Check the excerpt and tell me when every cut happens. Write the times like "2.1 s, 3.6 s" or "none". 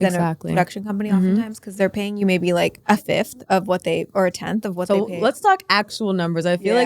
2.8 s